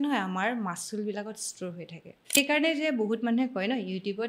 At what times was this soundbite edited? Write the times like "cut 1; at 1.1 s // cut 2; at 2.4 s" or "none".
cut 1; at 2.4 s